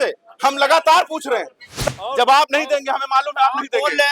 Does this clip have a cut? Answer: yes; 1 cut; at 1.8 s

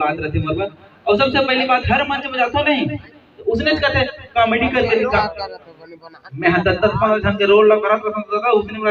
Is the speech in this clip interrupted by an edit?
no; 0 cuts

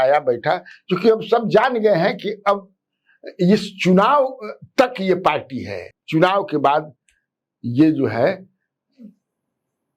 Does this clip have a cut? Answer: no; 0 cuts

